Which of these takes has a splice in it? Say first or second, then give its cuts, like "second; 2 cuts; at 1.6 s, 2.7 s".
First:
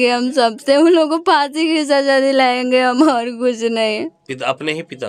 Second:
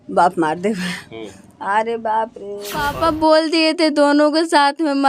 second; 1 cut; at 2.9 s